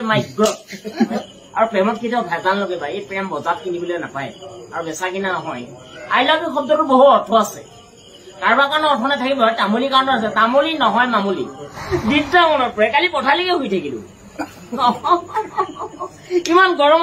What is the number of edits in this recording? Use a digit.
2